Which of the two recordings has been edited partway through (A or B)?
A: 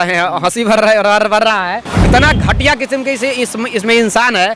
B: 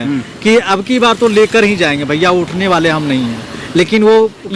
A